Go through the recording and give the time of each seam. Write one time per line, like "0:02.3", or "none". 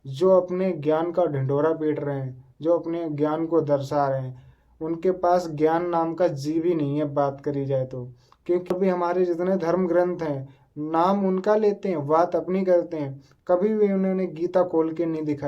0:08.7